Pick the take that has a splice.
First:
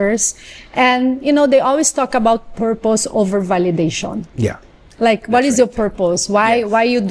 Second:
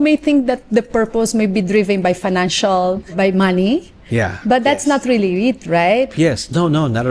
second; 1 cut; at 3.1 s

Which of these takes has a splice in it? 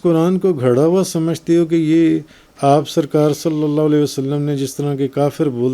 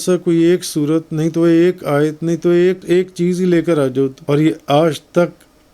second; 2 cuts; at 2.8 s, 4.2 s

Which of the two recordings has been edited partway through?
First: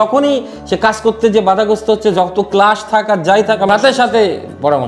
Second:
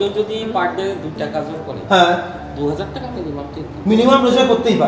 first; 1 cut; at 3.7 s

